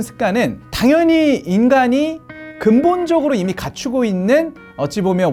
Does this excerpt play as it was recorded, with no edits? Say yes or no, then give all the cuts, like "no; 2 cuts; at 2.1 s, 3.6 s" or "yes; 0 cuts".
yes; 0 cuts